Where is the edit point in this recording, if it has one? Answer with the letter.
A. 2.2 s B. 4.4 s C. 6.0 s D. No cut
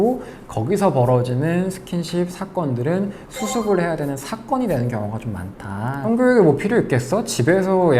C